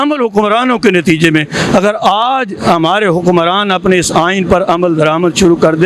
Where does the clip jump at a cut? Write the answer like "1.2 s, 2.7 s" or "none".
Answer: none